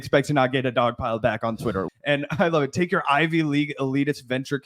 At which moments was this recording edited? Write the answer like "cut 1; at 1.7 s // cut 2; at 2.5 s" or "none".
cut 1; at 1.8 s